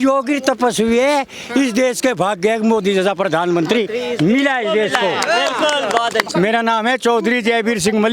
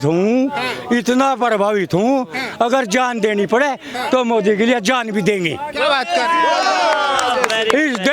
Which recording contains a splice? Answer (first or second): first